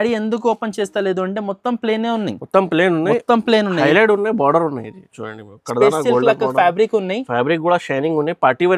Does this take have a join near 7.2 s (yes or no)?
no